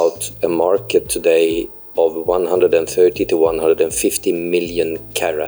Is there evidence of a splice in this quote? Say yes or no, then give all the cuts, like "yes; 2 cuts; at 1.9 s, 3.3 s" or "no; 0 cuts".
no; 0 cuts